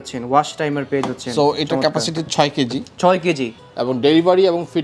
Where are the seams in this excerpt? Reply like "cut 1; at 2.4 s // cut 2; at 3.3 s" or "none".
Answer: cut 1; at 3.5 s